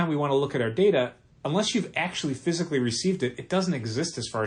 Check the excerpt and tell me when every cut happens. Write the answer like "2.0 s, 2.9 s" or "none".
none